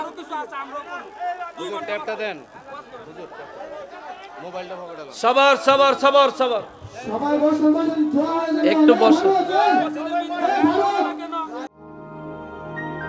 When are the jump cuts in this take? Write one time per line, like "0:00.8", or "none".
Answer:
0:11.7